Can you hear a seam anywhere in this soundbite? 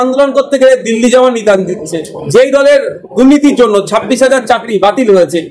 yes; 1 cut; at 2.1 s

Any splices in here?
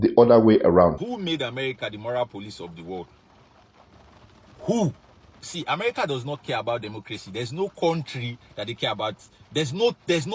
yes; 2 cuts; at 1.0 s, 5.4 s

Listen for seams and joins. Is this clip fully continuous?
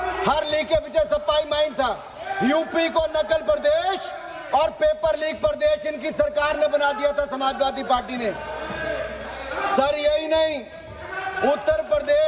yes; 0 cuts

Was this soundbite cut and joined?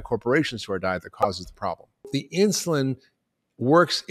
yes; 1 cut; at 2.1 s

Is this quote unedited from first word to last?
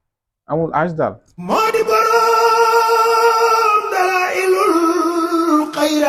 no; 1 cut; at 1.3 s

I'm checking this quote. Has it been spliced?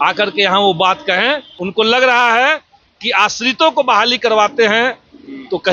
yes; 1 cut; at 1.5 s

